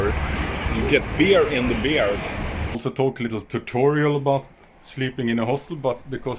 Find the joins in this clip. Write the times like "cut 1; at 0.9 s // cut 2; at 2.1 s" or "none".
cut 1; at 2.7 s